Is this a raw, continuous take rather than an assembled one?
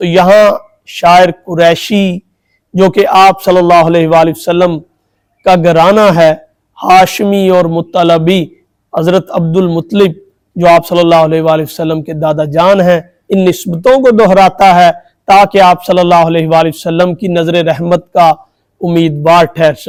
yes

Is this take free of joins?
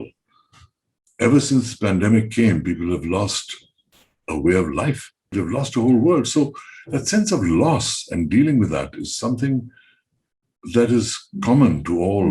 no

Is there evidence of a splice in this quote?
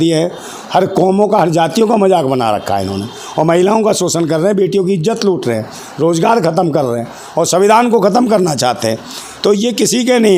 no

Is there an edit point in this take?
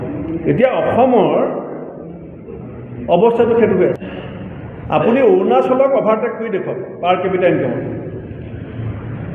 yes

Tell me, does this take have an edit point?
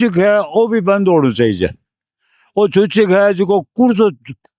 no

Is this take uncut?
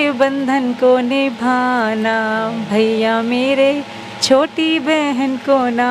yes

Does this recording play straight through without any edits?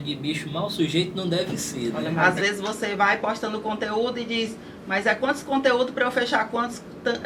no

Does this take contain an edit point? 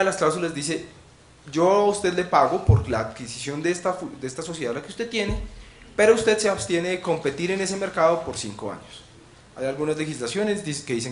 no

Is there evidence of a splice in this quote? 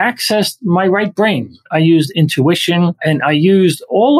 yes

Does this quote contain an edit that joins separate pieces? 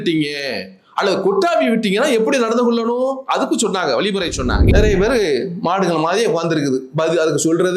yes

